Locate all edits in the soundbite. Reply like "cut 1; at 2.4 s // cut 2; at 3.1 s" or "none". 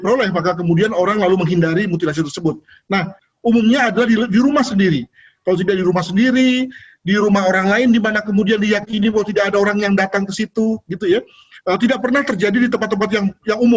cut 1; at 3.2 s